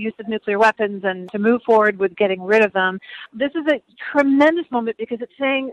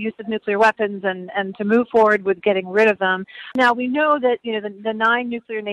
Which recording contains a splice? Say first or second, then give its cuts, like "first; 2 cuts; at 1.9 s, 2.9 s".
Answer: first; 2 cuts; at 1.3 s, 3.2 s